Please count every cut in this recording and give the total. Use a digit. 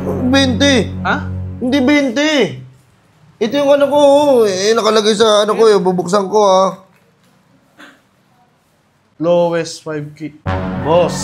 0